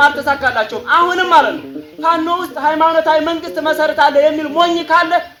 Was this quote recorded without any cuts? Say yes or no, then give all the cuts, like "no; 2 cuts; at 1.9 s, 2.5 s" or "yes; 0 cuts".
yes; 0 cuts